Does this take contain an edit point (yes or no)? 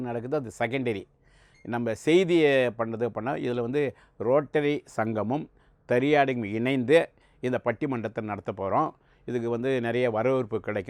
no